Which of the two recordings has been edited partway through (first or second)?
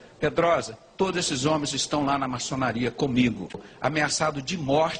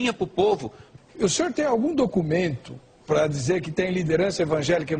first